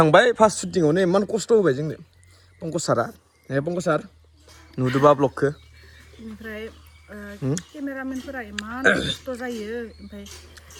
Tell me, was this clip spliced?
no; 0 cuts

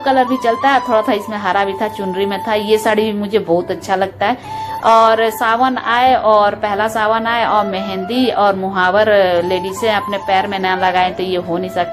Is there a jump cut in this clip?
no; 0 cuts

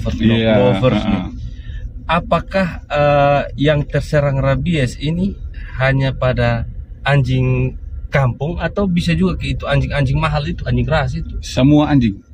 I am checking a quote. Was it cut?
no; 0 cuts

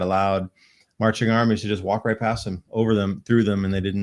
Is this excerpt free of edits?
yes; 0 cuts

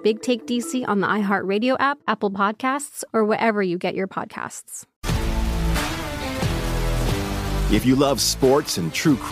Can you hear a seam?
no; 0 cuts

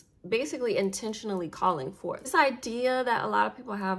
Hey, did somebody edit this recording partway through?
yes; 1 cut; at 2.3 s

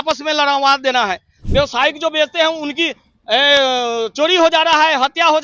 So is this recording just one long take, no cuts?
no; 1 cut; at 1.3 s

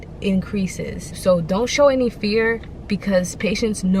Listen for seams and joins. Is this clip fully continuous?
no; 1 cut; at 1.0 s

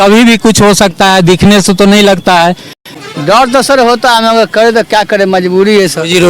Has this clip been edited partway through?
yes; 1 cut; at 2.7 s

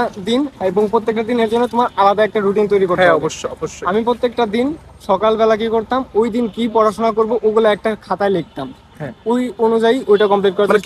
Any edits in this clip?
no; 0 cuts

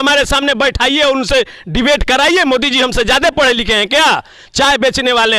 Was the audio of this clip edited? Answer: no; 0 cuts

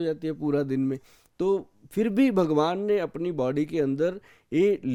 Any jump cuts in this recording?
no; 0 cuts

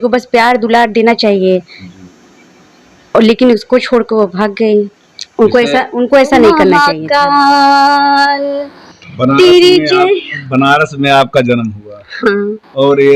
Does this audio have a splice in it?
yes; 1 cut; at 6.7 s

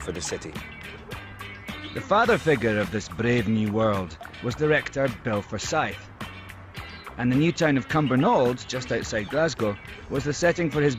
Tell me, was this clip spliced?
yes; 1 cut; at 8.7 s

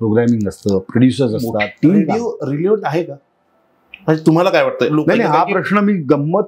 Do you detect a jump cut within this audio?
yes; 2 cuts; at 2.1 s, 4.9 s

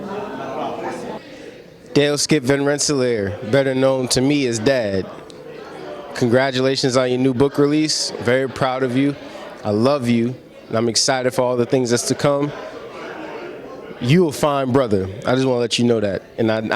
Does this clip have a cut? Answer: yes; 1 cut; at 1.2 s

